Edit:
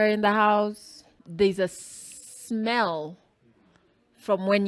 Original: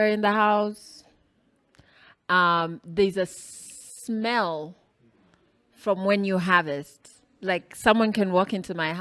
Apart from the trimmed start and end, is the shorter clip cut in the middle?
yes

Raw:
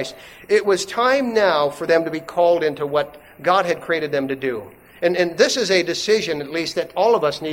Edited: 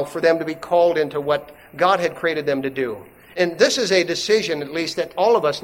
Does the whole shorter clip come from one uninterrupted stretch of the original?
no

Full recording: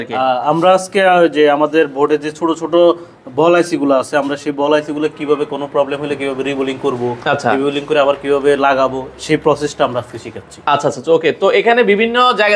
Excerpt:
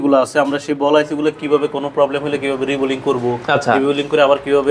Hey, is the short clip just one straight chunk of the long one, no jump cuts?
yes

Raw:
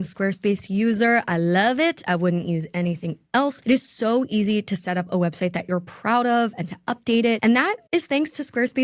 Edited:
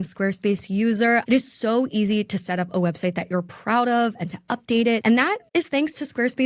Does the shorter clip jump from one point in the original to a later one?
yes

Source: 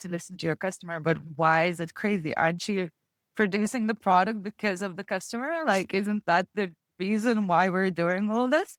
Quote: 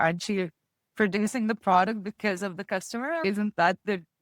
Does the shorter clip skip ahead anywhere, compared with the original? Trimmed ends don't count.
yes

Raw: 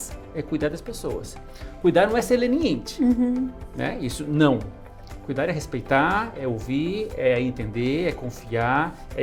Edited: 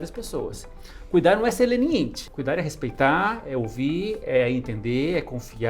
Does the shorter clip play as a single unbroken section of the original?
no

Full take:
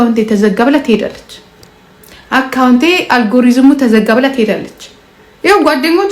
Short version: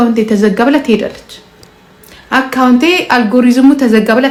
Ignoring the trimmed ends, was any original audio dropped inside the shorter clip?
no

